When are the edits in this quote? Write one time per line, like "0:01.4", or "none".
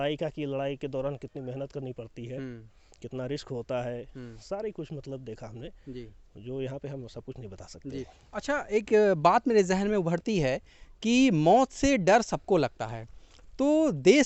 none